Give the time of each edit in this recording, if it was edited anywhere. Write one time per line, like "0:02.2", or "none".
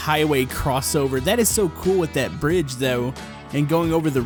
none